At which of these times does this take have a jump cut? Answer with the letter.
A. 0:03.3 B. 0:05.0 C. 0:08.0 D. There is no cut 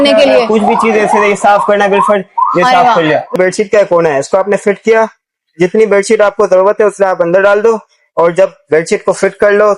A